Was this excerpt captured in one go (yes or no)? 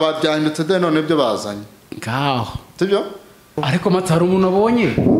no